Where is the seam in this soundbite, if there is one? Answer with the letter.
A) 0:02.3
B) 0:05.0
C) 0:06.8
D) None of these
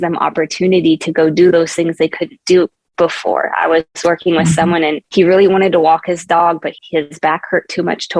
B